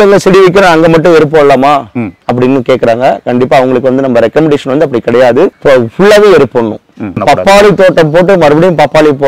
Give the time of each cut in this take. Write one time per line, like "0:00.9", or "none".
0:05.6
0:07.2